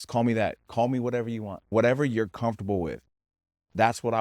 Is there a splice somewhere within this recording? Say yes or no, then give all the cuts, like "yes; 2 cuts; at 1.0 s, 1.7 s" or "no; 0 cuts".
yes; 1 cut; at 1.7 s